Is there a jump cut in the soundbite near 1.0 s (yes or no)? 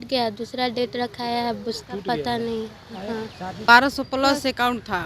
no